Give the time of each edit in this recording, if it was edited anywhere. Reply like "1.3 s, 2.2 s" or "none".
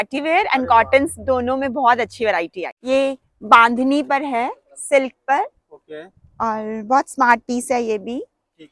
2.7 s

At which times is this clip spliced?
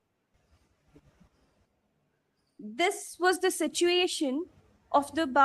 1.6 s

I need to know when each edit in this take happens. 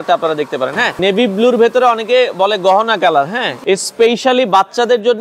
1.0 s, 3.5 s

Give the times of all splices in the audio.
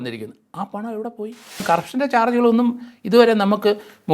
1.6 s

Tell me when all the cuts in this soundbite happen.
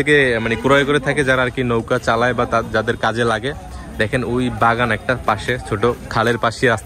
none

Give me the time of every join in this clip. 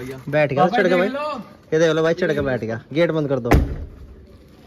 none

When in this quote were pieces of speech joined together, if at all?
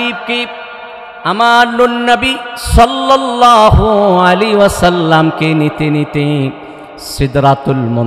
none

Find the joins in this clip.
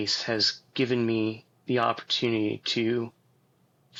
none

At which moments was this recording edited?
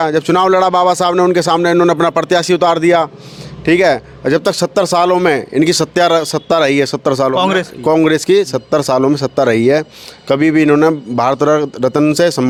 none

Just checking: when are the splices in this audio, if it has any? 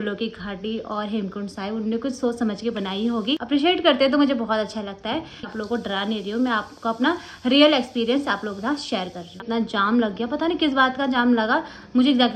3.4 s, 5.5 s, 9.4 s

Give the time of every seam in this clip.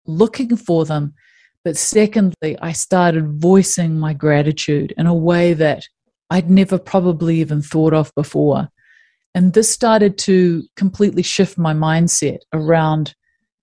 2.4 s

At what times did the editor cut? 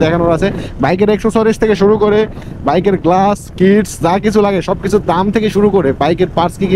none

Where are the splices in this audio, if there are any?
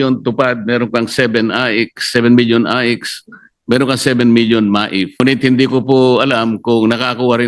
5.1 s

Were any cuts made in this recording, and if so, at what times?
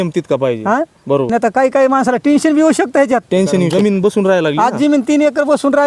1.3 s, 3.7 s

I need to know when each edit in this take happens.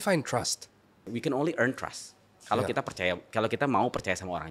1.1 s

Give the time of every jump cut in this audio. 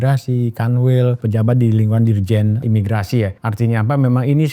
1.2 s, 2.6 s, 3.4 s

